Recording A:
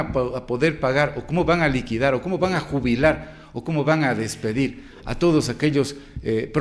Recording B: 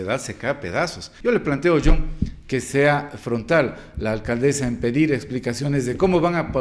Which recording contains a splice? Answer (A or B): B